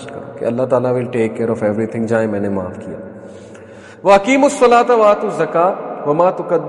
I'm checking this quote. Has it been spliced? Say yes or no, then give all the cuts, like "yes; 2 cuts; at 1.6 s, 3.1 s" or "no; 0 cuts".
no; 0 cuts